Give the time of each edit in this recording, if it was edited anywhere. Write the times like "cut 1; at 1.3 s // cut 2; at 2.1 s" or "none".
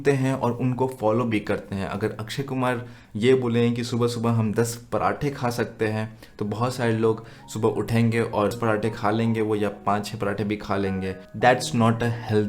cut 1; at 8.5 s // cut 2; at 11.2 s